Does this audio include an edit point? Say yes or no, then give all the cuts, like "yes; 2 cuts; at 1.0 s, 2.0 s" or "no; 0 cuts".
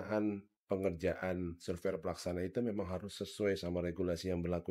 no; 0 cuts